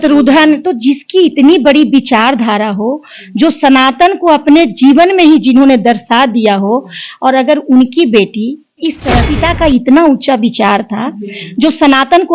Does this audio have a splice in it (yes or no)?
yes